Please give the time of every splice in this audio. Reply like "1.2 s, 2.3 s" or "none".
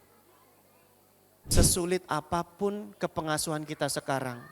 1.6 s